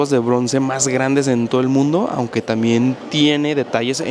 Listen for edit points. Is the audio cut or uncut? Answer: uncut